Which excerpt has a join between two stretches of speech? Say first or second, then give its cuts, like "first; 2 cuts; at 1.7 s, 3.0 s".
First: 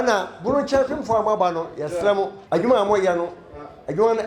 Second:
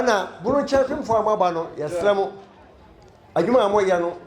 first; 1 cut; at 2.4 s